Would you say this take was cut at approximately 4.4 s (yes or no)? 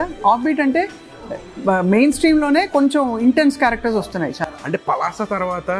no